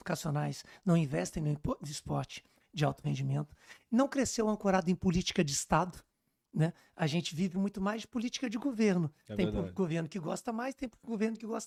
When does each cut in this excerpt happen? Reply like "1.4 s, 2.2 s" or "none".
none